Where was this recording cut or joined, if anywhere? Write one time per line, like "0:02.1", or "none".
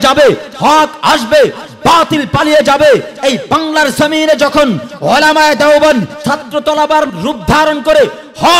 0:06.2
0:07.1